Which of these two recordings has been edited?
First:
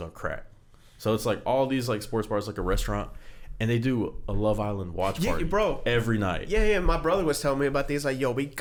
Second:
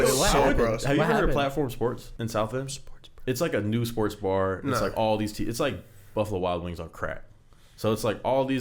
second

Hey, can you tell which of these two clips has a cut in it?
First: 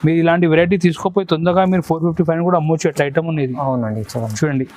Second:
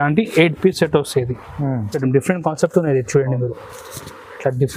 second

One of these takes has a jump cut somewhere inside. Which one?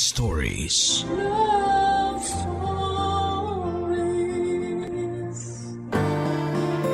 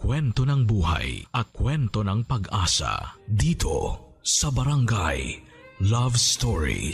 first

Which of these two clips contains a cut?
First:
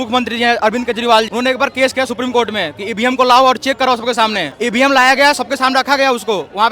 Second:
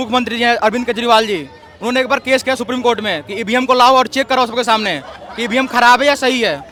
first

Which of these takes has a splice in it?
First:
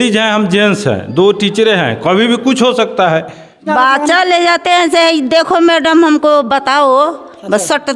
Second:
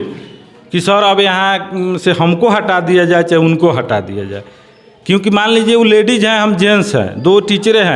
first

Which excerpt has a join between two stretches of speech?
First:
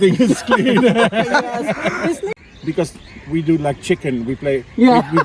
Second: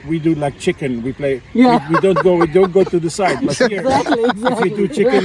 first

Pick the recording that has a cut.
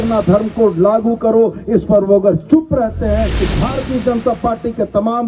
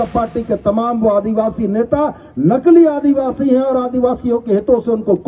first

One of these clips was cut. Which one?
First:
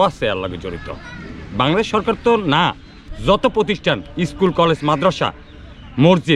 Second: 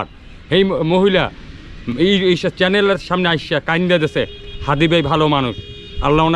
first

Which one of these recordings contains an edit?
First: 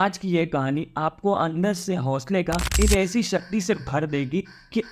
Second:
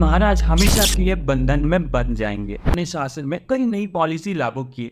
second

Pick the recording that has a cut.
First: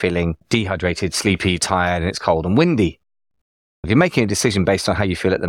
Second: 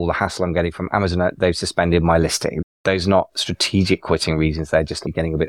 second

